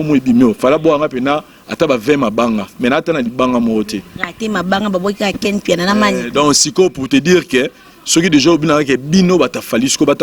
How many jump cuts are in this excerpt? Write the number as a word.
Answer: zero